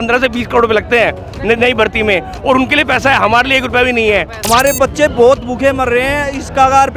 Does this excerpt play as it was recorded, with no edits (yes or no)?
no